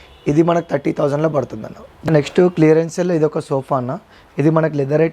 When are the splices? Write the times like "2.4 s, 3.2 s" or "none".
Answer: 2.1 s